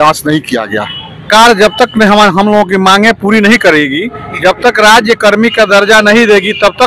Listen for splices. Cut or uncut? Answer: cut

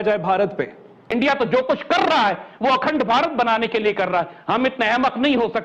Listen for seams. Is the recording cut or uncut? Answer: cut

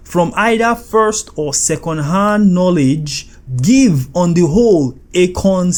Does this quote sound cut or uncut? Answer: uncut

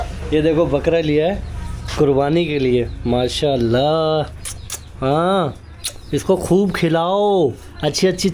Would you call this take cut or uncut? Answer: uncut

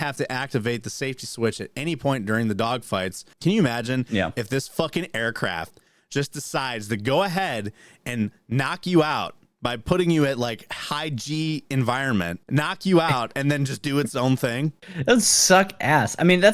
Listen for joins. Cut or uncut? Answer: cut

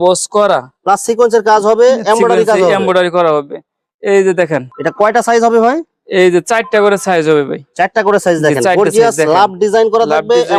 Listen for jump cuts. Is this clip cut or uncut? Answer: uncut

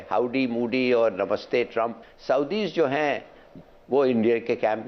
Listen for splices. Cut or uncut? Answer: cut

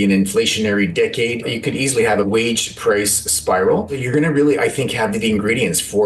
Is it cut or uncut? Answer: cut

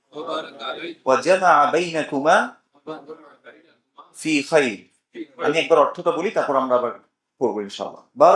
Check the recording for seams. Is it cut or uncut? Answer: uncut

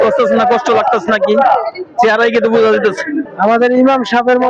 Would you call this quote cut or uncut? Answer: uncut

